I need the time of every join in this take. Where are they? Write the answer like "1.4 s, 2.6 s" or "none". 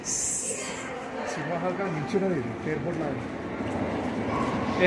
none